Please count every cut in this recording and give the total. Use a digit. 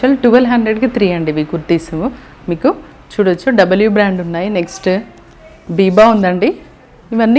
0